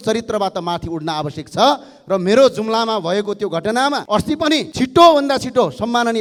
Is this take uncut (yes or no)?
yes